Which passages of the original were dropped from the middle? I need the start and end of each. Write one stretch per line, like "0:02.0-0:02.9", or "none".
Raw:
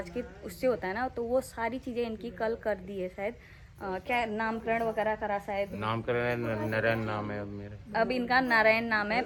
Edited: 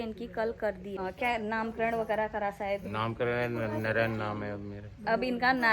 0:03.0-0:03.8